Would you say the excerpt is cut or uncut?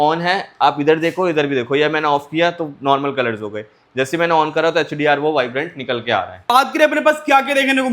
cut